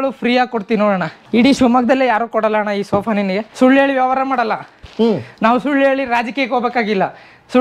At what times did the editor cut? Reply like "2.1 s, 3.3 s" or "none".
1.2 s, 3.5 s